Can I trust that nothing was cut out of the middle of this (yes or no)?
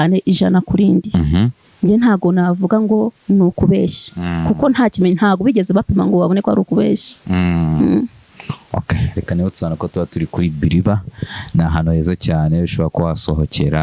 yes